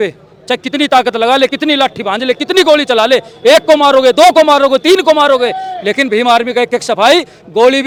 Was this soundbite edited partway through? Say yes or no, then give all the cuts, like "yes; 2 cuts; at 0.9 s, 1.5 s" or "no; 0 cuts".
no; 0 cuts